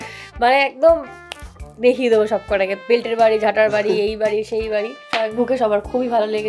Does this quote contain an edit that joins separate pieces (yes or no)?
yes